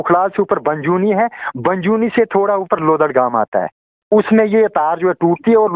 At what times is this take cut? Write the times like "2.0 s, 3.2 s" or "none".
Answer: none